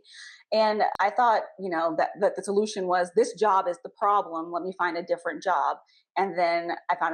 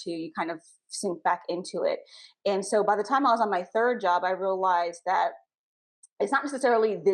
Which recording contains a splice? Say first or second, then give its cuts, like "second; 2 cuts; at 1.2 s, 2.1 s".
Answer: first; 1 cut; at 0.9 s